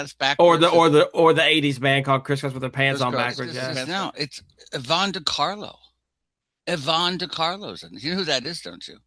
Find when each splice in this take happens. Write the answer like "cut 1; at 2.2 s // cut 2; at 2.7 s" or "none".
cut 1; at 3.8 s

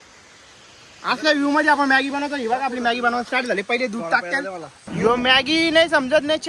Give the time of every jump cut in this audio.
cut 1; at 4.7 s

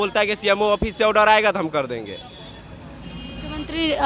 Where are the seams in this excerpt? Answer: none

